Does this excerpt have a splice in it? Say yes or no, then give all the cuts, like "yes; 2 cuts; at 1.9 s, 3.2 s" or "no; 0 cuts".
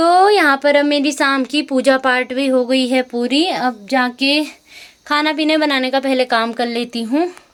no; 0 cuts